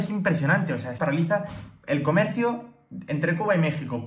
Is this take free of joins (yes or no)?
no